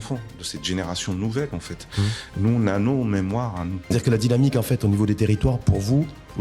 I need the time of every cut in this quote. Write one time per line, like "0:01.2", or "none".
0:03.9